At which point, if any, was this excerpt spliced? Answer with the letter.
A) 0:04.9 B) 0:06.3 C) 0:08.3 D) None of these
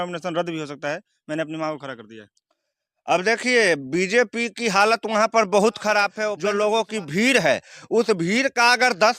B